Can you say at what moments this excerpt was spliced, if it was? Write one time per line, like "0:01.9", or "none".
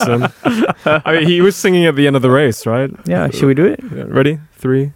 none